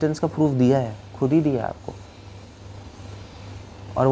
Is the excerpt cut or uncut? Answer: uncut